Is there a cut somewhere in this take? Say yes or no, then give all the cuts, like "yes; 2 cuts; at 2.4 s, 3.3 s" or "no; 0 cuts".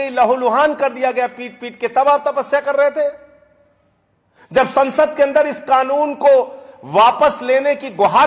no; 0 cuts